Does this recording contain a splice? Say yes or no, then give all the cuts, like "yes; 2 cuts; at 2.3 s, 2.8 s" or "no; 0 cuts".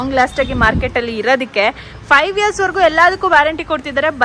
no; 0 cuts